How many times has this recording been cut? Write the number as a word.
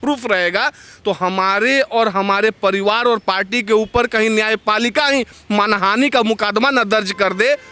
zero